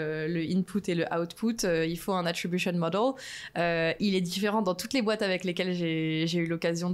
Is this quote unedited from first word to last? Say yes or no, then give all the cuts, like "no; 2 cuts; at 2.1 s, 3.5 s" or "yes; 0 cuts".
yes; 0 cuts